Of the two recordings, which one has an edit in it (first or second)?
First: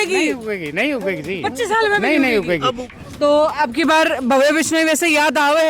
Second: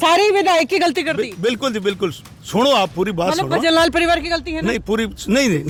first